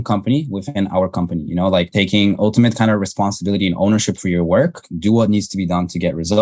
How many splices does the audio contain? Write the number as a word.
two